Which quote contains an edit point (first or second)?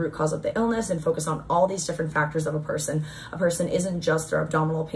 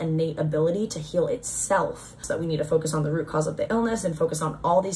second